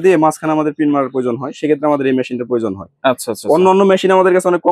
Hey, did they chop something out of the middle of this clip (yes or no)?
no